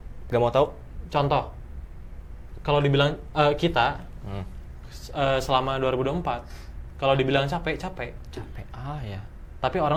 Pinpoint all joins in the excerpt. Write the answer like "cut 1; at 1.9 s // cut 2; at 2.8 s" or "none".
none